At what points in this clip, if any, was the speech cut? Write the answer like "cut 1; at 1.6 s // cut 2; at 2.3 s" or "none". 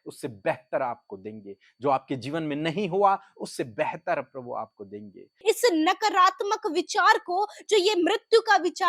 cut 1; at 5.4 s